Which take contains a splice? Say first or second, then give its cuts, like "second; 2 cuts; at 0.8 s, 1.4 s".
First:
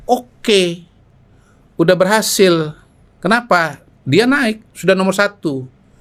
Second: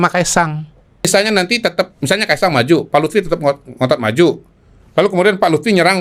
second; 1 cut; at 1.1 s